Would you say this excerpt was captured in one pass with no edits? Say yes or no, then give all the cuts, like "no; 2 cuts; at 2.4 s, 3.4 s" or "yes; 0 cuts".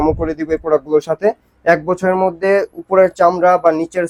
yes; 0 cuts